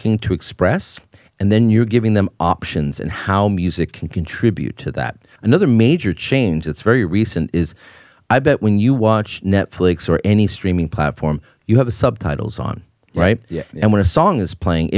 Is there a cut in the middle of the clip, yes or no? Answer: yes